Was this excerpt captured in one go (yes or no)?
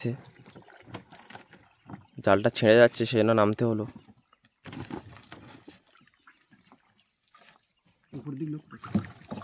yes